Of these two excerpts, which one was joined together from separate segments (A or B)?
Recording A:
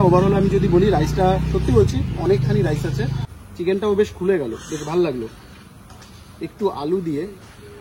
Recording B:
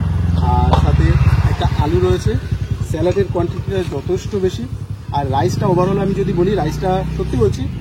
A